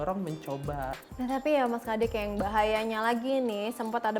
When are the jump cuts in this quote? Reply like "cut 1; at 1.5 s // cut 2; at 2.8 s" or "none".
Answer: cut 1; at 1.0 s